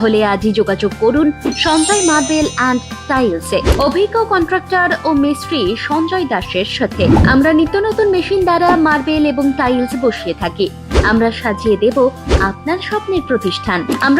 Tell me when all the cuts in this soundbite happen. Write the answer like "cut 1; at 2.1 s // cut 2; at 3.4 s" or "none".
none